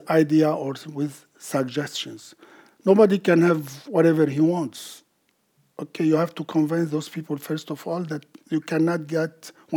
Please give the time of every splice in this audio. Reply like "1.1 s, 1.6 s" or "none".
none

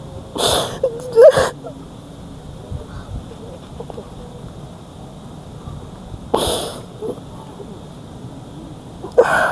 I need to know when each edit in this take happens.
1.9 s

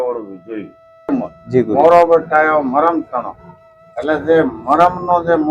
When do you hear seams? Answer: 1.1 s

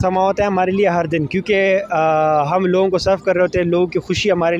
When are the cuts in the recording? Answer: none

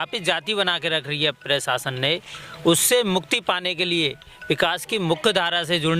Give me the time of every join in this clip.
none

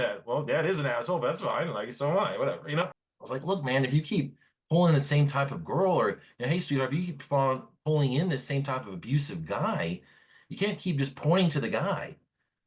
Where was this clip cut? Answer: 3.0 s

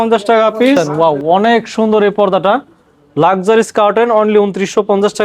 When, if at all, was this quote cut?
0.9 s

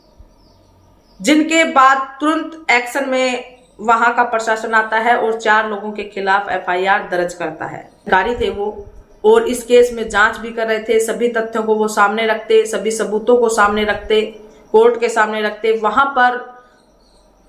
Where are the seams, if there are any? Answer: 8.1 s

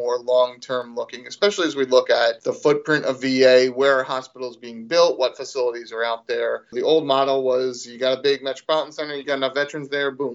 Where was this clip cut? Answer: 2.5 s, 6.7 s, 9.2 s

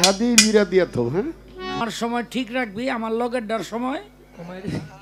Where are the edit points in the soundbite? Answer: 1.8 s

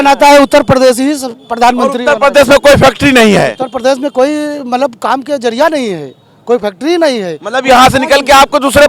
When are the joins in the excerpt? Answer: none

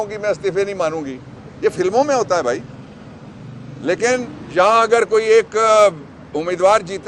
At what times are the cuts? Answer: 4.4 s

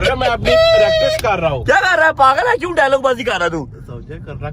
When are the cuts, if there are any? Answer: none

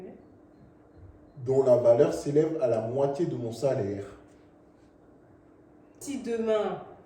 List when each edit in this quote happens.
6.0 s

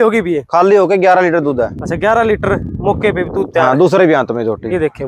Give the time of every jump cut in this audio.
none

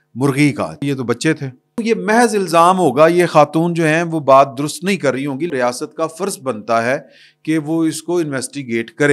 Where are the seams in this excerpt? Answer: 0.8 s, 1.8 s, 5.5 s

